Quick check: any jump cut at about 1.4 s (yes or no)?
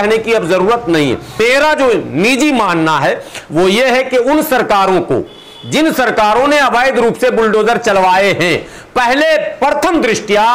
yes